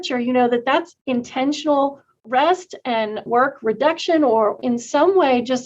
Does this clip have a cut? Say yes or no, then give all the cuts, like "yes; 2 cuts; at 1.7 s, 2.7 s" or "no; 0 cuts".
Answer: yes; 3 cuts; at 1.0 s, 3.2 s, 4.6 s